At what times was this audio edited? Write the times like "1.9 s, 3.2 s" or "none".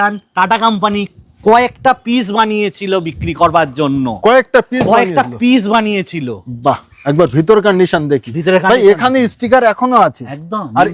none